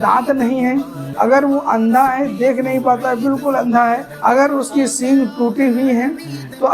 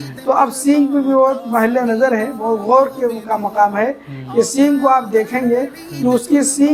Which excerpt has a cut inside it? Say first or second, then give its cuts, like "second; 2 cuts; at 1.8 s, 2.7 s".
first; 2 cuts; at 1.0 s, 4.1 s